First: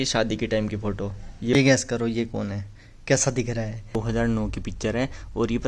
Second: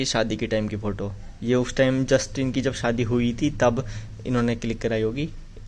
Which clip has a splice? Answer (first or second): first